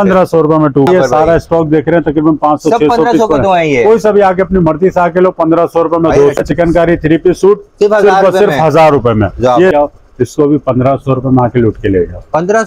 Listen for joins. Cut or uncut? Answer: cut